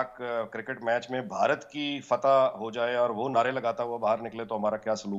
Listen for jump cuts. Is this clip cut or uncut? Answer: uncut